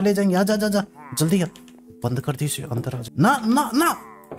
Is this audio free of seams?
no; 1 cut; at 3.0 s

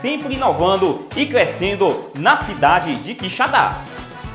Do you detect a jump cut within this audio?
yes; 1 cut; at 1.1 s

